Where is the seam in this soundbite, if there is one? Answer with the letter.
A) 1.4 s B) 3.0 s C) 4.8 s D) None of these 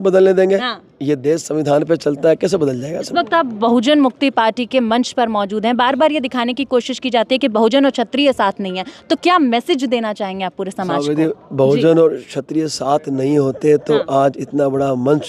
B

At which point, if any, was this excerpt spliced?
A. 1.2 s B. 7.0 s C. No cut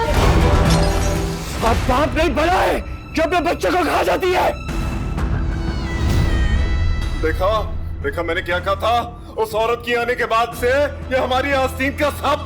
A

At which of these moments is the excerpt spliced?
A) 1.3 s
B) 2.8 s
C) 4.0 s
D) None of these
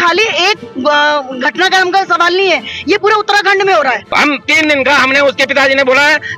C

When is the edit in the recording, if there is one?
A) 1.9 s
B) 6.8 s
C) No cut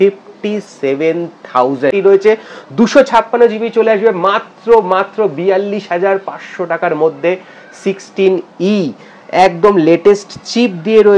A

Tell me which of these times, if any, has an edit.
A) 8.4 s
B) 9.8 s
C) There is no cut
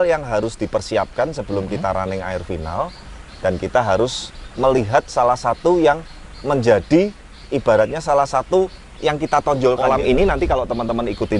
B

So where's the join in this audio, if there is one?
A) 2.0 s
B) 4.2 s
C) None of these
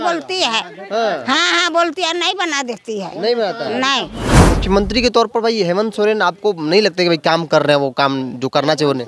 B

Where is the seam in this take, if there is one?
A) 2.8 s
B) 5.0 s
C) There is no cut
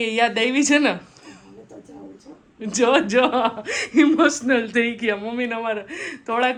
C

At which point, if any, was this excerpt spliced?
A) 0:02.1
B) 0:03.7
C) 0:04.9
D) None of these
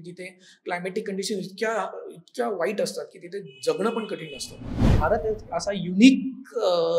C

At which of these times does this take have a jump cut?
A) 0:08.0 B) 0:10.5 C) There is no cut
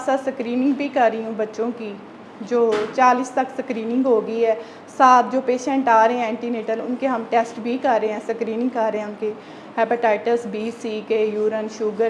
C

